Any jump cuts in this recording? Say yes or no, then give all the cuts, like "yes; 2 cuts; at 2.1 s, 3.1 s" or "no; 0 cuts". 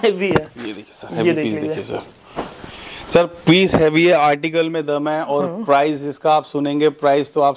no; 0 cuts